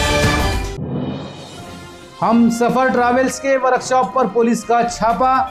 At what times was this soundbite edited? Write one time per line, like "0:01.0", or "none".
0:01.4